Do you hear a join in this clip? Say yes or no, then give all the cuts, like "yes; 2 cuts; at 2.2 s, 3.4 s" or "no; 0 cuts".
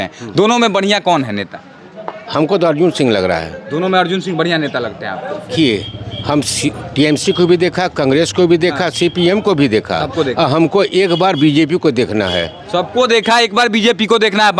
yes; 1 cut; at 5.5 s